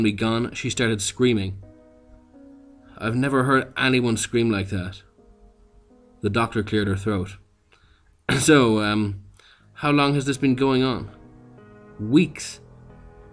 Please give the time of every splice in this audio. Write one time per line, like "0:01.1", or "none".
0:03.7